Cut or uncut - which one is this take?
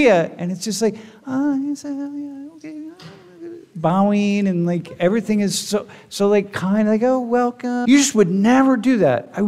cut